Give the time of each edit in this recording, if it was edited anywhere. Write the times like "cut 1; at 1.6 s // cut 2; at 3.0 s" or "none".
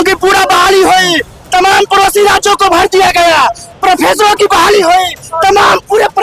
none